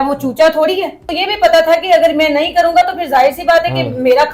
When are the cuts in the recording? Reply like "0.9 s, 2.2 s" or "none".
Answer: 1.1 s